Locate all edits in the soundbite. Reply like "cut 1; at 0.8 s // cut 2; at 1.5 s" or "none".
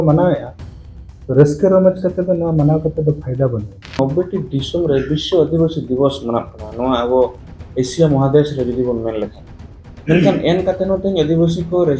cut 1; at 4.0 s